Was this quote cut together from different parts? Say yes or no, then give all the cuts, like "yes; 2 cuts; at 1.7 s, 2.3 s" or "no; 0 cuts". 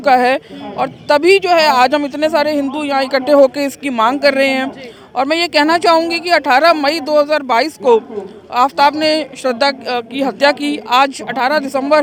no; 0 cuts